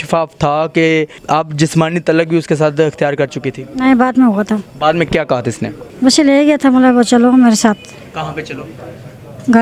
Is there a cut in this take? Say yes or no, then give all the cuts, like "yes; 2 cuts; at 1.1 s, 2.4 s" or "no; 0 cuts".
yes; 3 cuts; at 1.2 s, 4.7 s, 5.8 s